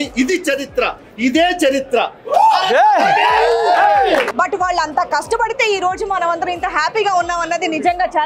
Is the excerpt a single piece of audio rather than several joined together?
no; 1 cut; at 4.3 s

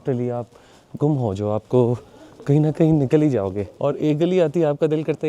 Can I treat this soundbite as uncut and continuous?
no; 1 cut; at 3.7 s

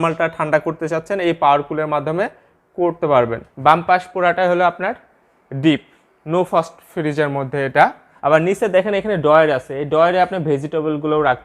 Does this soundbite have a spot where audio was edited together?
yes; 2 cuts; at 3.5 s, 8.1 s

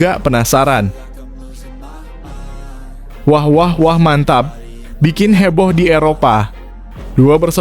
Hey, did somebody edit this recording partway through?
yes; 2 cuts; at 1.4 s, 3.2 s

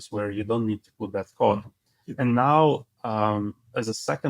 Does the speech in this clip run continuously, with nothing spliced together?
yes; 0 cuts

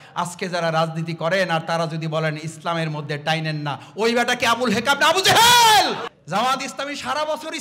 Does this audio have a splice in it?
yes; 1 cut; at 6.0 s

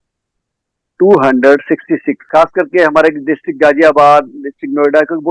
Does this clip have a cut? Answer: yes; 1 cut; at 2.2 s

